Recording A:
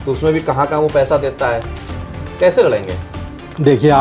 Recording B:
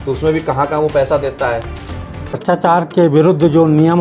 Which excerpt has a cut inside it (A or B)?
B